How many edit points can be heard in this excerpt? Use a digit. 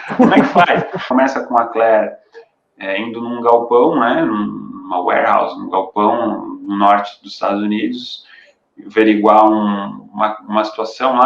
1